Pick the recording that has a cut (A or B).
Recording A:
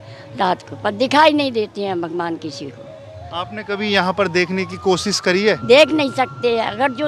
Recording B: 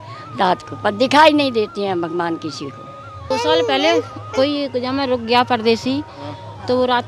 B